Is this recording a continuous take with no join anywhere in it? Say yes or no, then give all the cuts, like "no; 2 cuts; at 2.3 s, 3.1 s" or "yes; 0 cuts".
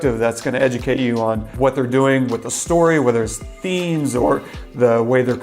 no; 1 cut; at 1.5 s